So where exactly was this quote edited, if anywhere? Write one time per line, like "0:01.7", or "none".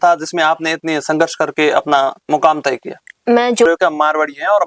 0:03.7